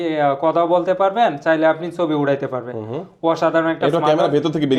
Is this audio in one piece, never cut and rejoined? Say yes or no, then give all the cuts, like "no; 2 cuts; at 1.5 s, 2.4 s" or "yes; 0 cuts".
yes; 0 cuts